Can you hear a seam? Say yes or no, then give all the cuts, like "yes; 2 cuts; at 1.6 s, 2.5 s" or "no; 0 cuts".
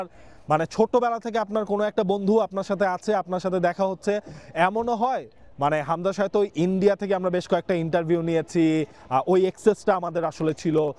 no; 0 cuts